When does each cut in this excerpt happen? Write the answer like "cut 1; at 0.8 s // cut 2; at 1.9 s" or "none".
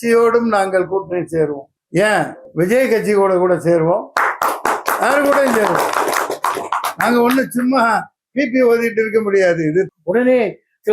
cut 1; at 1.7 s // cut 2; at 2.4 s // cut 3; at 9.9 s

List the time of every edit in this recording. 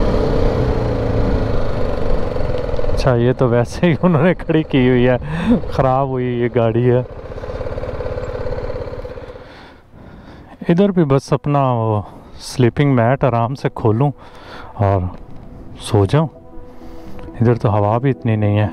cut 1; at 9.3 s

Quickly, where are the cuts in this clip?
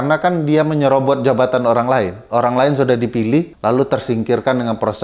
cut 1; at 3.5 s

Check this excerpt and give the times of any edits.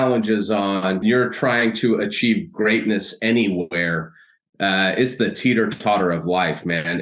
cut 1; at 1.0 s

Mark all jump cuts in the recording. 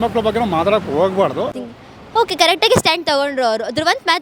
cut 1; at 1.6 s

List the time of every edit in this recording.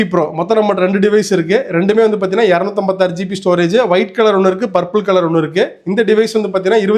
none

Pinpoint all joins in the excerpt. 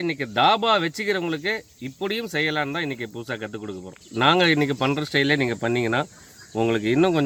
none

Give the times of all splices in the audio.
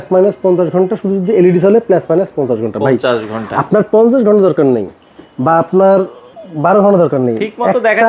none

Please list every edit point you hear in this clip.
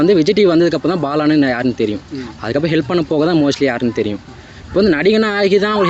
none

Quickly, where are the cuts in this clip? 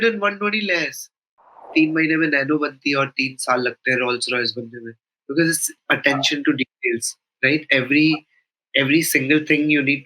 cut 1; at 1.6 s

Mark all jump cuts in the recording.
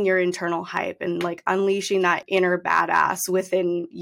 cut 1; at 2.2 s

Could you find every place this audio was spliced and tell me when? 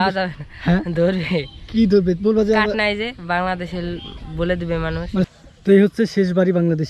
cut 1; at 5.3 s

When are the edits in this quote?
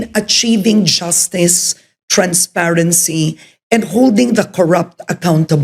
none

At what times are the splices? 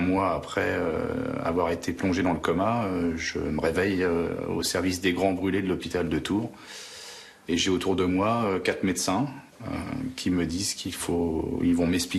none

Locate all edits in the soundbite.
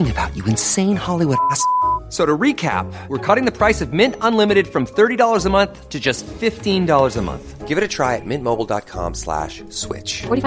none

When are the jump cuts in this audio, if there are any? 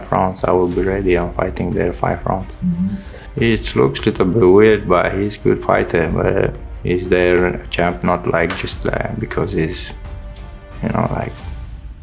cut 1; at 3.2 s

